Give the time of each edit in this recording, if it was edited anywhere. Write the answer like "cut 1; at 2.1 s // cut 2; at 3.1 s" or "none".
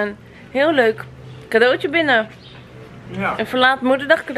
none